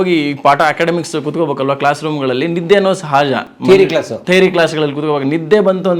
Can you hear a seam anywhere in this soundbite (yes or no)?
no